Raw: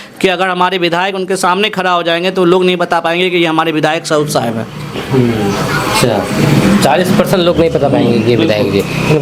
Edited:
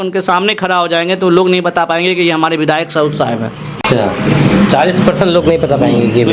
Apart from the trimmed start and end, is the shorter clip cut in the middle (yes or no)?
yes